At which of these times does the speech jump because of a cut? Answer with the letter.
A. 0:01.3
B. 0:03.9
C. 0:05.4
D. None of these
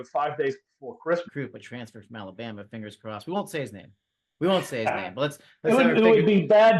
A